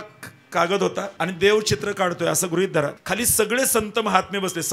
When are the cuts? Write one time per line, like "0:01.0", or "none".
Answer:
0:01.1
0:03.0

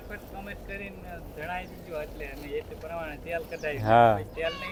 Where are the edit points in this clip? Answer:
none

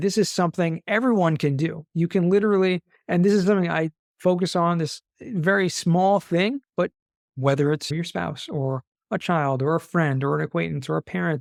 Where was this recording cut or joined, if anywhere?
none

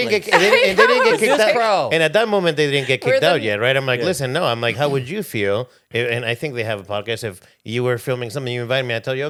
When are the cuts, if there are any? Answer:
none

